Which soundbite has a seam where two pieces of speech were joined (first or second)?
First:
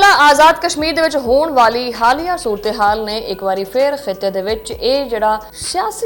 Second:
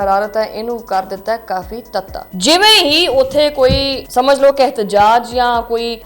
second